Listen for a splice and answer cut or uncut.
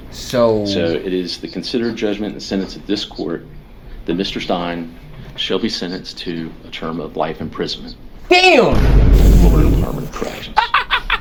uncut